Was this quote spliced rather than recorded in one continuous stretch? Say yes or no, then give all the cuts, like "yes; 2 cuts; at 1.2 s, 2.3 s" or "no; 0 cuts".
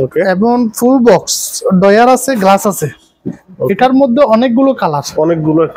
no; 0 cuts